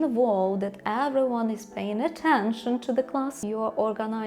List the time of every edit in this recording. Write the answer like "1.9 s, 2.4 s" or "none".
3.4 s